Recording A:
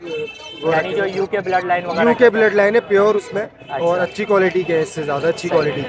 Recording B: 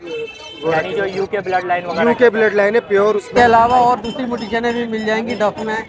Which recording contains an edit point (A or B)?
B